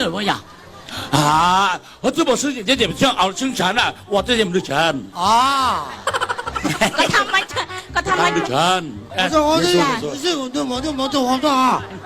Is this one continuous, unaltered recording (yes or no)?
no